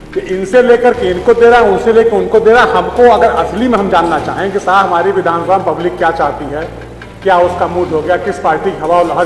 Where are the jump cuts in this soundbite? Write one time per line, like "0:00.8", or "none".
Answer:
none